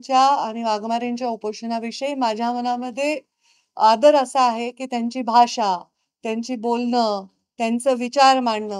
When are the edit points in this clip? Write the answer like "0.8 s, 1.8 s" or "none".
none